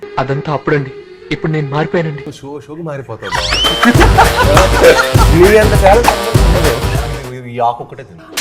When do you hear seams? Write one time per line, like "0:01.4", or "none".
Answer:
0:07.0